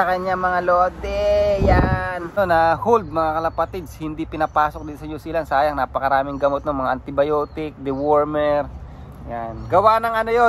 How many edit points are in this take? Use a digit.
1